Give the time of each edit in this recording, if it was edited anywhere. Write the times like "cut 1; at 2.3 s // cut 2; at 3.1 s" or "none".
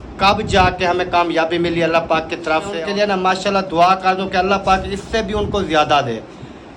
cut 1; at 2.7 s